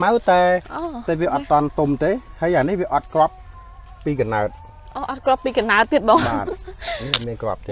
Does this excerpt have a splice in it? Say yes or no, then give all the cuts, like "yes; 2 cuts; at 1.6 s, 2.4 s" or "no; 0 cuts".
no; 0 cuts